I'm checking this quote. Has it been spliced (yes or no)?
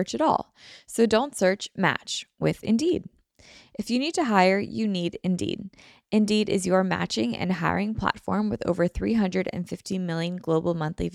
no